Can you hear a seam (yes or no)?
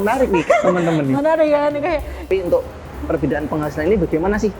yes